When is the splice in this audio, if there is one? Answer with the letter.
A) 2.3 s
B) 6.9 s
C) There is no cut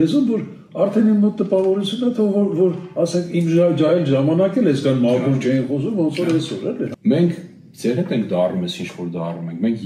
B